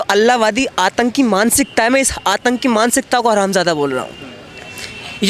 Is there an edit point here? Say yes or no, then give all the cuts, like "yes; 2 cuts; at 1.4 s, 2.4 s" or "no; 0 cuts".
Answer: no; 0 cuts